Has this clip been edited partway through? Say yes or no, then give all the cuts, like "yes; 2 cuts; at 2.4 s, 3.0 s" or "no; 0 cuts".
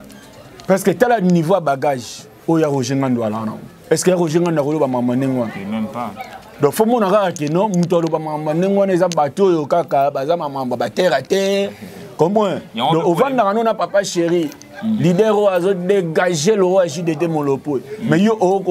no; 0 cuts